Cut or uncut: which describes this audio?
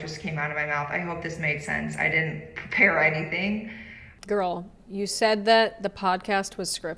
uncut